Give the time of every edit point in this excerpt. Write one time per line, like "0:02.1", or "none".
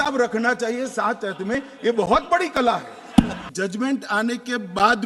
0:03.4